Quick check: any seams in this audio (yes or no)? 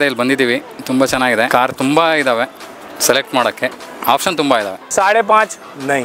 yes